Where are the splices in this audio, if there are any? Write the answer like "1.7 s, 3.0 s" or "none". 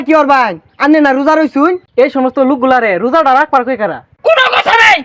1.8 s, 4.1 s